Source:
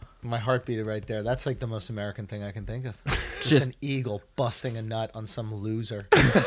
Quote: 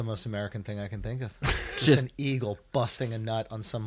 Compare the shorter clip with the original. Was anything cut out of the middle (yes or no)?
no